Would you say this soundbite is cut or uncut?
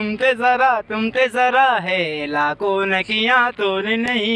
uncut